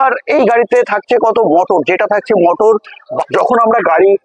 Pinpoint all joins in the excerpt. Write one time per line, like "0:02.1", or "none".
0:03.2